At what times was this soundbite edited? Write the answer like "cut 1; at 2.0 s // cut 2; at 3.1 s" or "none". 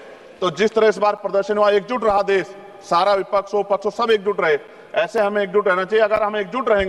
none